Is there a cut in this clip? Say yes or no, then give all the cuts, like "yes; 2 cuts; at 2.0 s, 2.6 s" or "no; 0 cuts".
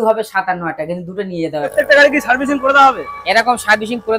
yes; 1 cut; at 1.7 s